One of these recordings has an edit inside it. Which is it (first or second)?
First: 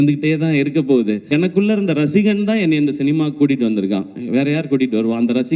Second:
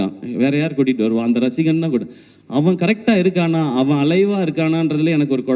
first